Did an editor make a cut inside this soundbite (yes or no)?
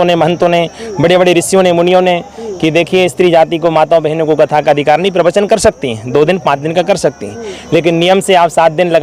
no